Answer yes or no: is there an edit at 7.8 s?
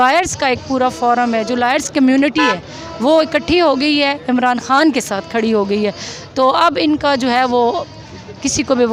no